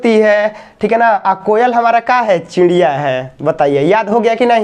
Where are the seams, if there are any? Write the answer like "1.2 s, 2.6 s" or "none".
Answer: none

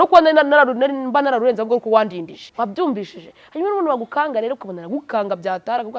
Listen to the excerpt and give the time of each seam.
2.4 s

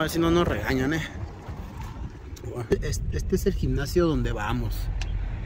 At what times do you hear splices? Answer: 2.7 s

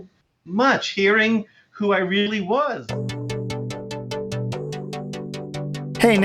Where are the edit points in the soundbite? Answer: 2.8 s

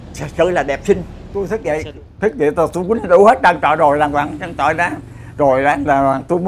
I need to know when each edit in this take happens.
1.2 s

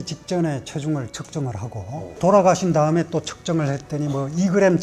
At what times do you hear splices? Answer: 2.1 s

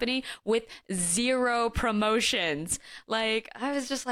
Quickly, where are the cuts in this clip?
none

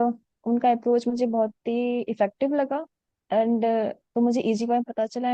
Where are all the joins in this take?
none

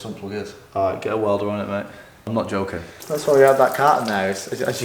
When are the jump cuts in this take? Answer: 2.2 s, 2.9 s

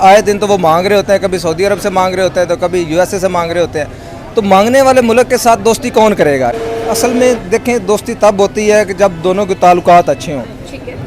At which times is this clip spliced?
6.6 s

